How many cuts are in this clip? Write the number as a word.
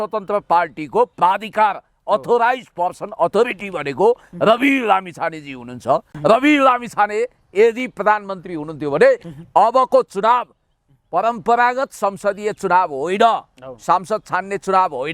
one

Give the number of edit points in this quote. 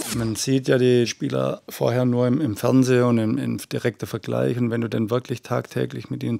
one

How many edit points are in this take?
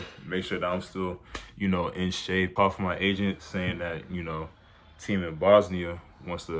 one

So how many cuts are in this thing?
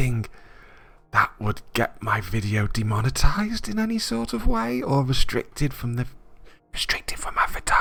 zero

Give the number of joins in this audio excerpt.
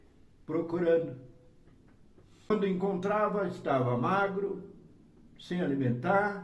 one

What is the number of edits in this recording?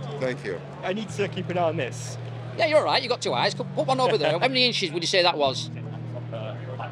two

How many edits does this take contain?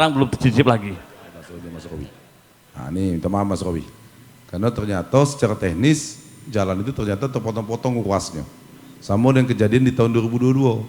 one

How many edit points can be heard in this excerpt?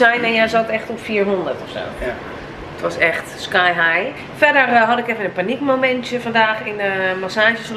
one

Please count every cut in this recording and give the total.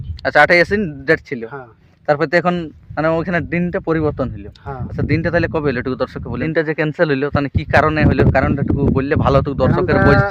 one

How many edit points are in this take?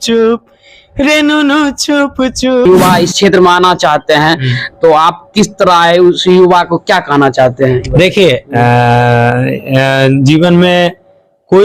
one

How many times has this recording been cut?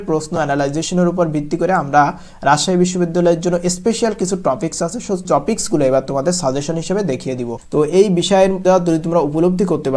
three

